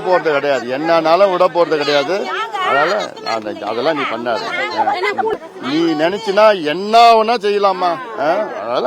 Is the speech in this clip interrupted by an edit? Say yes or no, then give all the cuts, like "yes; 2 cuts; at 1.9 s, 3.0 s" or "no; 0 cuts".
yes; 1 cut; at 5.3 s